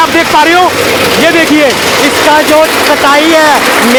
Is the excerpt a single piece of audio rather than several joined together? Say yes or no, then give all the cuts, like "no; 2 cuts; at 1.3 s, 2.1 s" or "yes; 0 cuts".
yes; 0 cuts